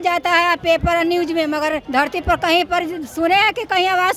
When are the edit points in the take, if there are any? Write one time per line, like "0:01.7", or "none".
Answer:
0:01.8

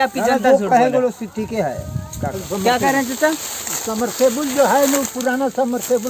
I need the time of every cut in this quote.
0:02.4

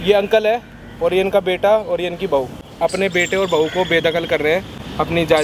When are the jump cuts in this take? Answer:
0:02.6

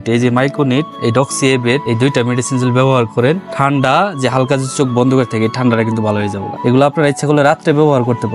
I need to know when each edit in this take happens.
0:00.9
0:01.8
0:03.5
0:06.4

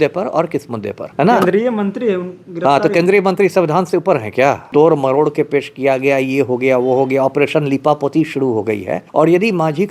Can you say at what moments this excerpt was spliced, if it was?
0:01.0
0:04.6
0:09.0

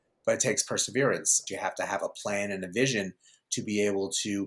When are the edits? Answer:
0:01.5

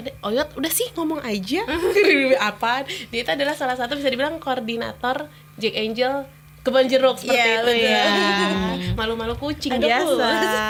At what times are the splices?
none

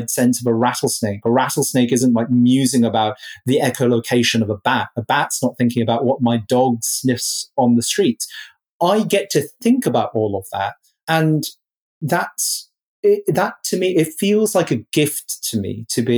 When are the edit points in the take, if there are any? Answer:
0:11.0

